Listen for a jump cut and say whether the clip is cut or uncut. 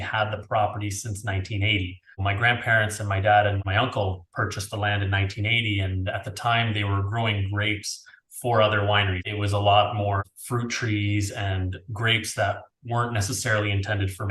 cut